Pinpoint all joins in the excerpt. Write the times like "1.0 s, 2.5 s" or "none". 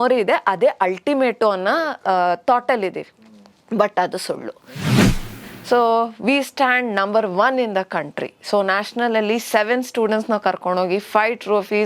5.2 s